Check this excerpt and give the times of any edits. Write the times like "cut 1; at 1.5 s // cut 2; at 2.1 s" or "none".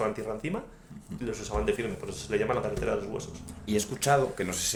none